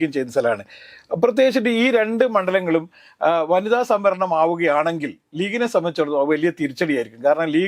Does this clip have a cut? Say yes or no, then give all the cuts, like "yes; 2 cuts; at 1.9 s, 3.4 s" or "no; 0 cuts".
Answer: no; 0 cuts